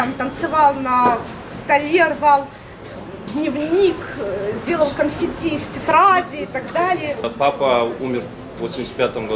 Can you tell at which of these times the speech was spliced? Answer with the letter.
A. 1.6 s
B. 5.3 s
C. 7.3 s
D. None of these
C